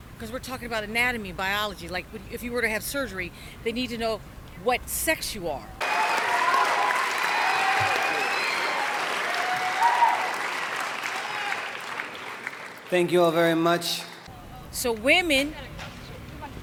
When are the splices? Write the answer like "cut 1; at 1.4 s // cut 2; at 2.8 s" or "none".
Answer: none